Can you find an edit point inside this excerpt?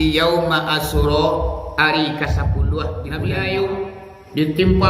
yes; 1 cut; at 3.1 s

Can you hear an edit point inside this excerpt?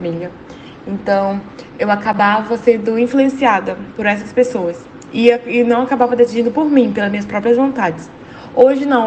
no; 0 cuts

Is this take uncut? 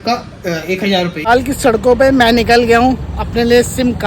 no; 1 cut; at 1.2 s

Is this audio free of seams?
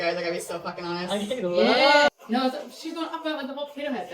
no; 1 cut; at 2.1 s

